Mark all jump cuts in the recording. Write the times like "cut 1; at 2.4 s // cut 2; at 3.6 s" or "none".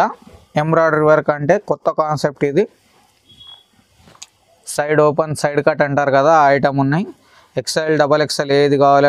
none